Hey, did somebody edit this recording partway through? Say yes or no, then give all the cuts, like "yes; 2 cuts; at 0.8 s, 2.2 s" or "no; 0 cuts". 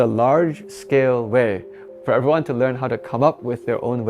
yes; 1 cut; at 1.8 s